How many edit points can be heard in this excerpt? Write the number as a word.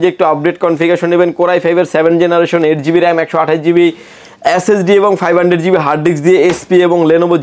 zero